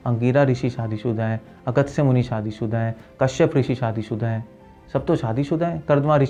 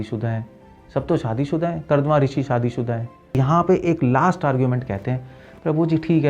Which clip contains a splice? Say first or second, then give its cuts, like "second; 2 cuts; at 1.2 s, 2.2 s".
second; 1 cut; at 3.4 s